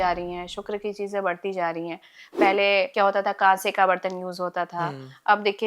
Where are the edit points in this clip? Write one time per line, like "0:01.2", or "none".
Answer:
0:02.9